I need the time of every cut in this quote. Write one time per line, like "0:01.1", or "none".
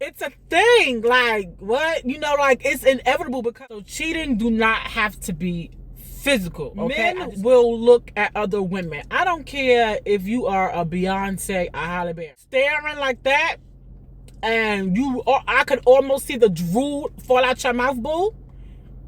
0:03.6
0:07.0
0:12.2